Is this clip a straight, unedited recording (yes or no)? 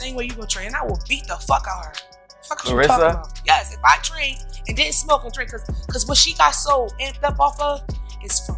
yes